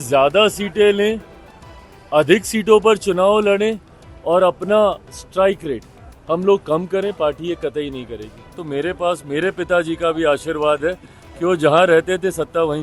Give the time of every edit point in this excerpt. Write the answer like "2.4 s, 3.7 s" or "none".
8.6 s